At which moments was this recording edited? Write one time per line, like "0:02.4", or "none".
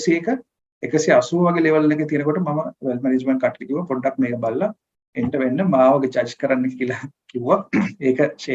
none